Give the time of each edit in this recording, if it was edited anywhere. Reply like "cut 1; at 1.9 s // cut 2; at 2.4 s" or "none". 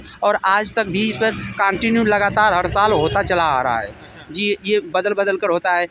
none